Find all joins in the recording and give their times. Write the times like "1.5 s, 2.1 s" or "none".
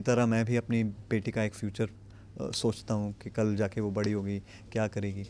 none